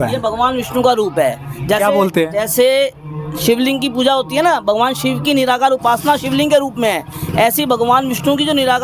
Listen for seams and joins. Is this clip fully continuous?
yes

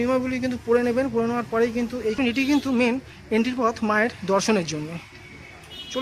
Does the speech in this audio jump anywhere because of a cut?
yes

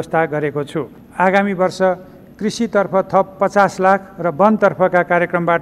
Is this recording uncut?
no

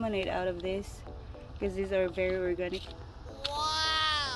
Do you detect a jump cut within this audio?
yes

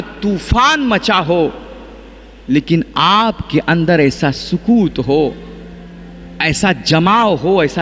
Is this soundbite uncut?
yes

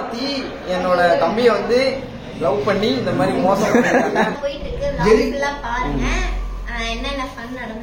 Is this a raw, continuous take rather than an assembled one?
no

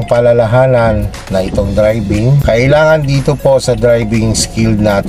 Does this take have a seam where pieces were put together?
yes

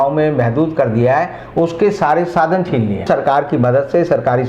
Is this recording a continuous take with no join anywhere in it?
no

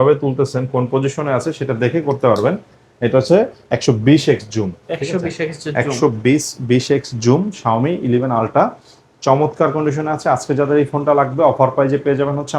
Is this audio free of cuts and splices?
yes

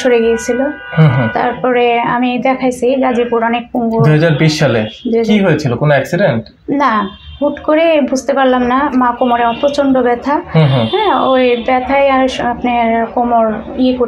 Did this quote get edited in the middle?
no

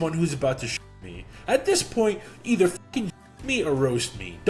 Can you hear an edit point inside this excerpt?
no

